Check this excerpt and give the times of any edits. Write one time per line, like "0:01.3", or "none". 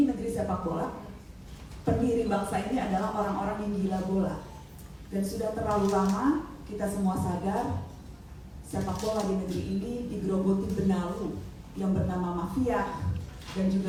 none